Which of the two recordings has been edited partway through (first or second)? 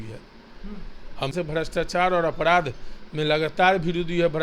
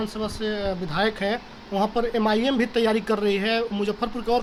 first